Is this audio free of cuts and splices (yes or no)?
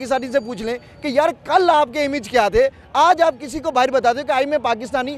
yes